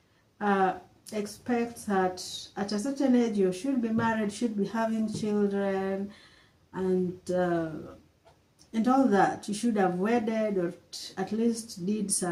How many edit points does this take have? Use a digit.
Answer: 0